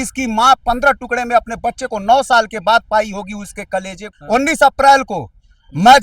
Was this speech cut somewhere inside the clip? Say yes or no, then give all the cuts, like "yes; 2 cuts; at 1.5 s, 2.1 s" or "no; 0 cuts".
yes; 1 cut; at 4.1 s